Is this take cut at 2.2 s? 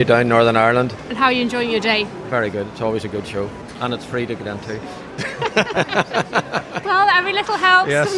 no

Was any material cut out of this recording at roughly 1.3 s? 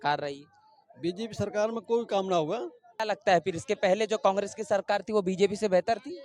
no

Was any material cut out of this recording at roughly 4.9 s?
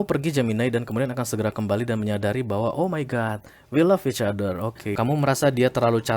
yes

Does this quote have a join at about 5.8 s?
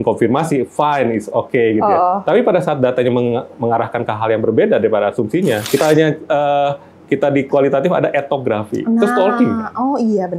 yes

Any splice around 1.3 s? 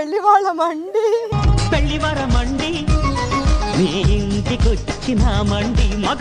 yes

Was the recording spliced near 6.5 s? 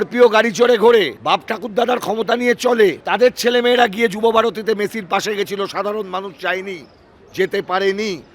no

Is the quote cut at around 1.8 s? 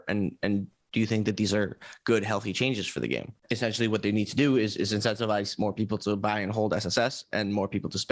no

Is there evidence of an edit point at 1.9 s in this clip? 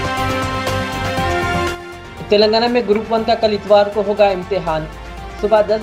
yes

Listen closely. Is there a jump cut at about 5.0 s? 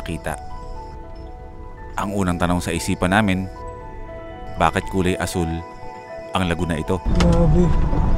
no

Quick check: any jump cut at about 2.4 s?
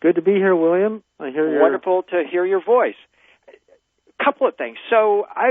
yes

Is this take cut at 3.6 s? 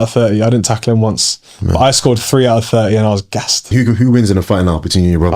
yes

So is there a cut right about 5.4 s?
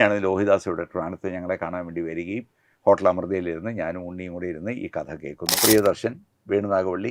yes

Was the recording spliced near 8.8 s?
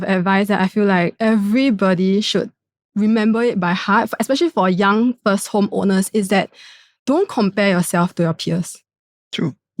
no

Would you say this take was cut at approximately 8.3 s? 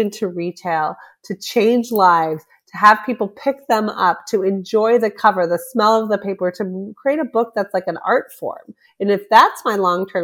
no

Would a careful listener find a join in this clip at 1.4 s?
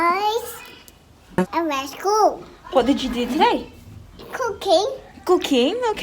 yes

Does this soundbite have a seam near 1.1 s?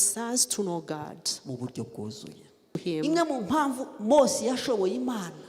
no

